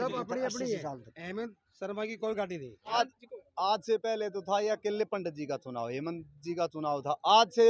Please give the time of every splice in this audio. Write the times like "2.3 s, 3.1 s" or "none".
2.9 s